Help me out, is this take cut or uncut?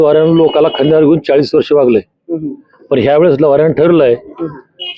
uncut